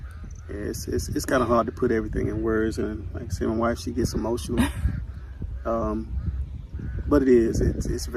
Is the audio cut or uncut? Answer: uncut